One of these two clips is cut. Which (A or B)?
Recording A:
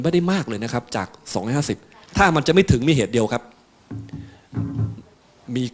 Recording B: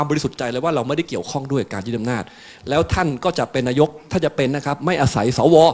A